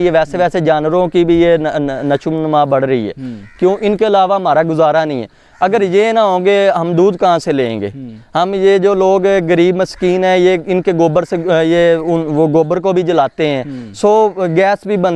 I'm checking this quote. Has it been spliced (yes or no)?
no